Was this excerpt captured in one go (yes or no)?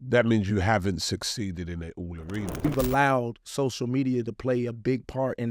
no